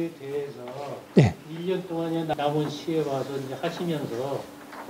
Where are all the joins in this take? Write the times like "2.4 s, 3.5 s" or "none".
2.3 s